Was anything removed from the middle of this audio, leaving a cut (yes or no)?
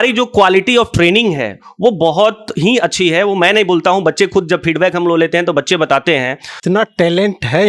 yes